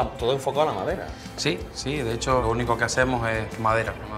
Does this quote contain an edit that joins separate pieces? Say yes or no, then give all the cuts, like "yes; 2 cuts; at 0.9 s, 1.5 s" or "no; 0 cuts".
yes; 1 cut; at 2.4 s